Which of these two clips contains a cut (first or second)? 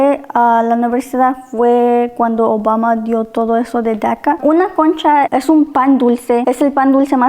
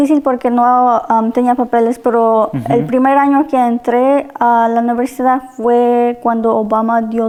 first